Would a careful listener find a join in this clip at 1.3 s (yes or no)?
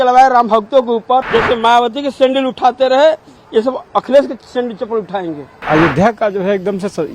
yes